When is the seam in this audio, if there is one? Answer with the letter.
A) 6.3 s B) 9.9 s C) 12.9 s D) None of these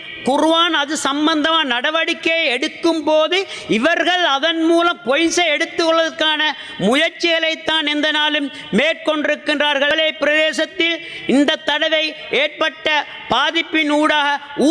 B